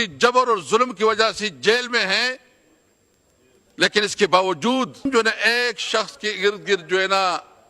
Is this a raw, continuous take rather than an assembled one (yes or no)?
no